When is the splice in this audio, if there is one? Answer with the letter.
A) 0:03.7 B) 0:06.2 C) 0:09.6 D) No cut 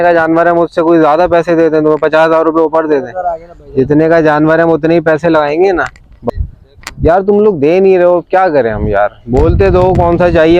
B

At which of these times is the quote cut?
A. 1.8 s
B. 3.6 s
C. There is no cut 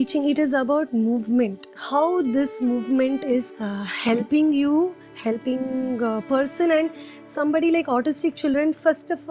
B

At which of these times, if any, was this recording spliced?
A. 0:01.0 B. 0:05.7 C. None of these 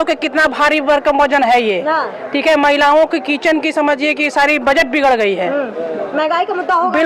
C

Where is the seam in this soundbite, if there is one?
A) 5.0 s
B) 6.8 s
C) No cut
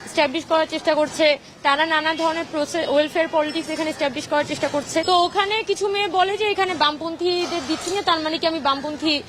A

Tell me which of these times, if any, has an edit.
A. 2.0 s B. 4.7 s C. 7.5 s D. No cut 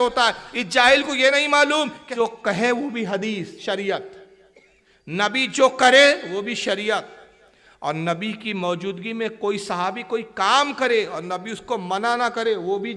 A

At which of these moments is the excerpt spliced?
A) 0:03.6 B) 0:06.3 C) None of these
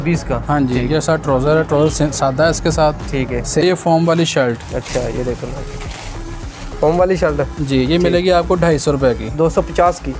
A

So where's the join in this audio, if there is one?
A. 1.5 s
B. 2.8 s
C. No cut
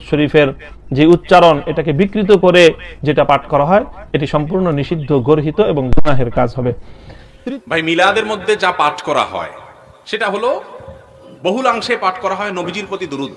C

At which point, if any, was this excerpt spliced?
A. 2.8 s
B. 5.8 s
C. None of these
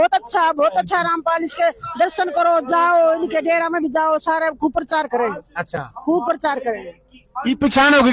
C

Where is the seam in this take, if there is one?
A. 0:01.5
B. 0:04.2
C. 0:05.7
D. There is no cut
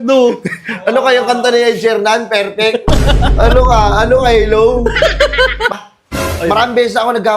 C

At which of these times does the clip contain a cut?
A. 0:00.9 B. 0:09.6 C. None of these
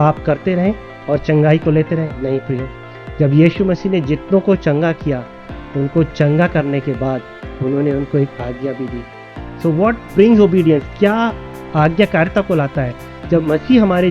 B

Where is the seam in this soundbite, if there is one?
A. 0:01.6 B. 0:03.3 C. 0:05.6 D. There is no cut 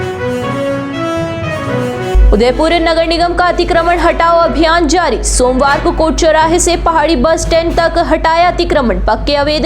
A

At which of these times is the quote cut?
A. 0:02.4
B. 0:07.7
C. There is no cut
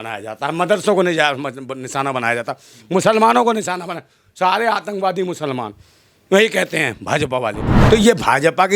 B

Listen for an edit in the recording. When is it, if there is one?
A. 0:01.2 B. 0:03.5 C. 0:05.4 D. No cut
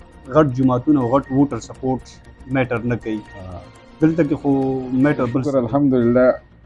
C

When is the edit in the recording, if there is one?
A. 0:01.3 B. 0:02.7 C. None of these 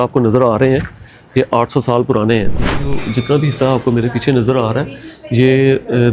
B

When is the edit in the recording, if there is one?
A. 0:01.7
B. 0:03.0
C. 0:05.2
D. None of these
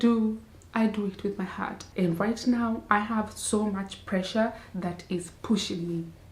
A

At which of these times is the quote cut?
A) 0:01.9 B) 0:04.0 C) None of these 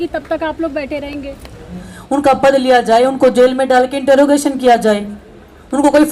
A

